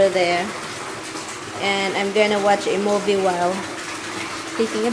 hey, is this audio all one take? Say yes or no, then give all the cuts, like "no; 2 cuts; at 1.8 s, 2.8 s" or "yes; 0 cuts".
yes; 0 cuts